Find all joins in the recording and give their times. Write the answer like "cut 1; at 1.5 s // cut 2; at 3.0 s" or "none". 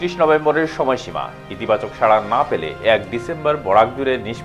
none